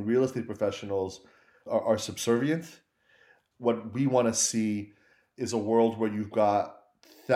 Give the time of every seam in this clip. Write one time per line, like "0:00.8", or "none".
0:01.6

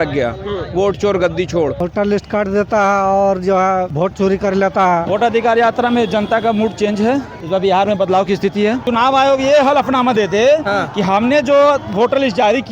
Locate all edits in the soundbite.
0:02.2
0:03.9
0:05.0
0:07.4
0:08.8

